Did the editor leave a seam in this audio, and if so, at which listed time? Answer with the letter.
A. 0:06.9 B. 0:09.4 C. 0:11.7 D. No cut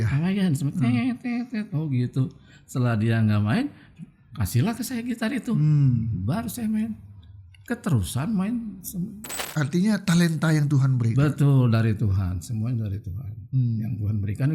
B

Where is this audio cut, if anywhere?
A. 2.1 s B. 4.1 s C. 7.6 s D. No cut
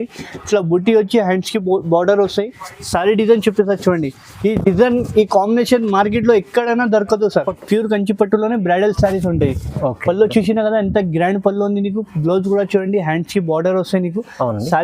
C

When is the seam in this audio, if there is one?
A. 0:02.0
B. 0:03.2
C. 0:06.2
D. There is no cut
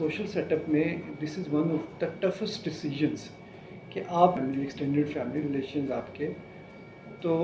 D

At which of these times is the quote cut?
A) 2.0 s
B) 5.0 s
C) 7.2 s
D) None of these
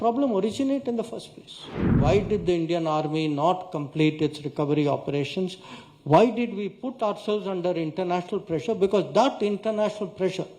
A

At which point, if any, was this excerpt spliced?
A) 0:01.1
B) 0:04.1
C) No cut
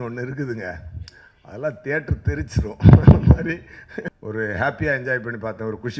B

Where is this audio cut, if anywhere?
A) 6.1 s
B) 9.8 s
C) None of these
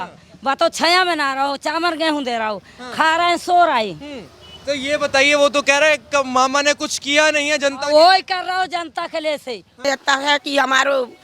B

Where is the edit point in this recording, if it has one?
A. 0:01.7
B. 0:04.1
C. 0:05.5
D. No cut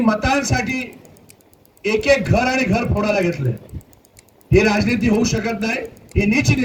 D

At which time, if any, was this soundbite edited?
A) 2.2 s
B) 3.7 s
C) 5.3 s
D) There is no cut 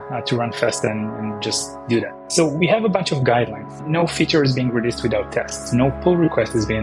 A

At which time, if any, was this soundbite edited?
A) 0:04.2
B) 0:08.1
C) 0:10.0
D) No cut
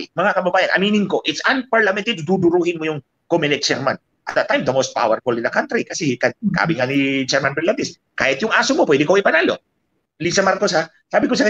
C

